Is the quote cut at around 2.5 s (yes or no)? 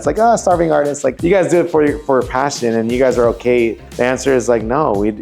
no